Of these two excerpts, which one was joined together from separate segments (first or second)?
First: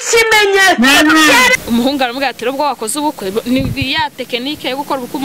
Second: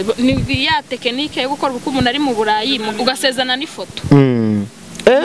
first